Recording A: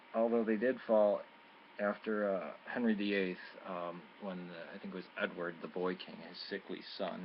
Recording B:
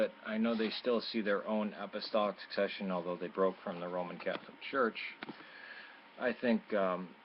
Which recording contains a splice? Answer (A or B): B